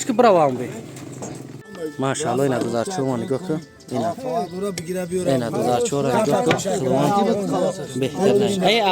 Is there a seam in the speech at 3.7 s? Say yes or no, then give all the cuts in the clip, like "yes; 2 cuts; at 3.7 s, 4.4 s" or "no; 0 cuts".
no; 1 cut; at 1.6 s